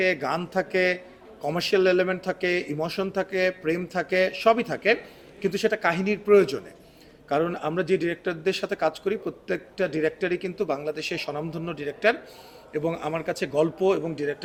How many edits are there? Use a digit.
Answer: 0